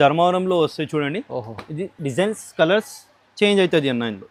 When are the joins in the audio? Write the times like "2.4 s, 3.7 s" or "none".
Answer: none